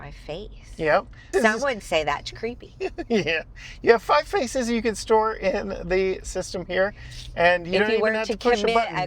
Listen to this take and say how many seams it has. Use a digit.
1